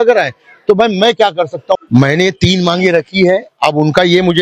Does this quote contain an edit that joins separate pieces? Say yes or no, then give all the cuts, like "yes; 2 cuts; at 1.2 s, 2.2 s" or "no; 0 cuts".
yes; 1 cut; at 1.8 s